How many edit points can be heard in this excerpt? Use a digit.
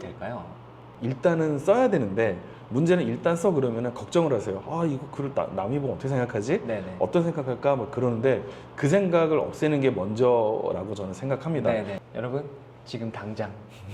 1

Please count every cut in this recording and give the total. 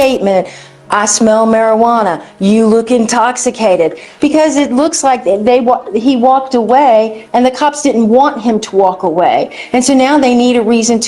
0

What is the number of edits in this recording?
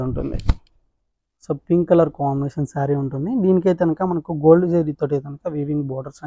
0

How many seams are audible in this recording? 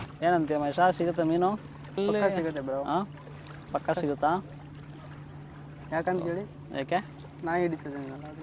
1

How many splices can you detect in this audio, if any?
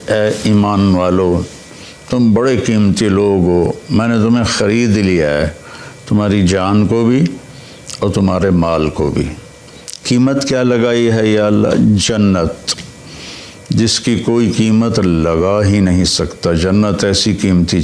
0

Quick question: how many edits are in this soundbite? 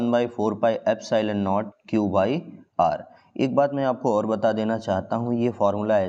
0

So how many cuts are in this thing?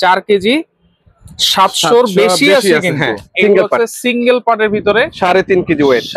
1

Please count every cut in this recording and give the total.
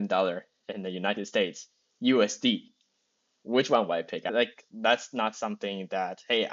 1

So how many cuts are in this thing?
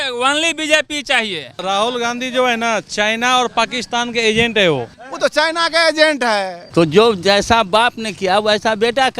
3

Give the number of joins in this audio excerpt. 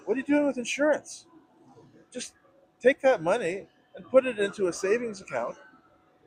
0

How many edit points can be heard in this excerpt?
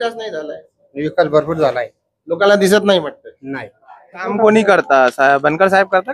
1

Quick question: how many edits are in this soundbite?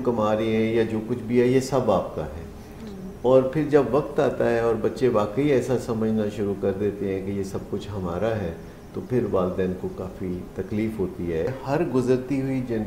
1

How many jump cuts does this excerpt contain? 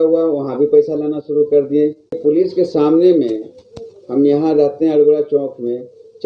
1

